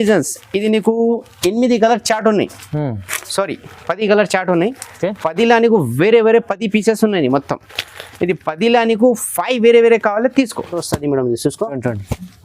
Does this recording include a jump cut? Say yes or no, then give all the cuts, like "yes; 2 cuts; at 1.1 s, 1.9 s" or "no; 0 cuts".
yes; 1 cut; at 10.8 s